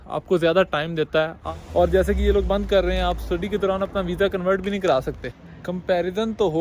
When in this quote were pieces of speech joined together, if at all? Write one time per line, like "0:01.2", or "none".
0:01.4
0:05.3